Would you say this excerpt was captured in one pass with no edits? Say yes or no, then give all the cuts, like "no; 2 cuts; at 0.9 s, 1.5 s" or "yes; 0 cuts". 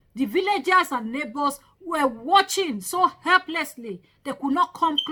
yes; 0 cuts